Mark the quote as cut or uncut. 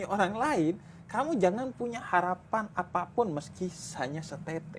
uncut